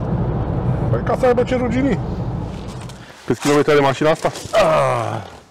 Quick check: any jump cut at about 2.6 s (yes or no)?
yes